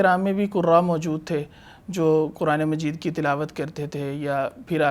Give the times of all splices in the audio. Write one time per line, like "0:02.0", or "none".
none